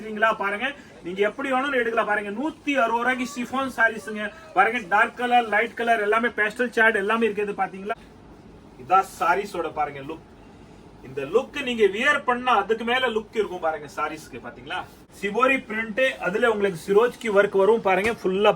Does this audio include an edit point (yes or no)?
yes